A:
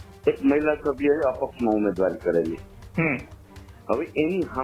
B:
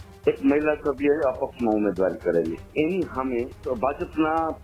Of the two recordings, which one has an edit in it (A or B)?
B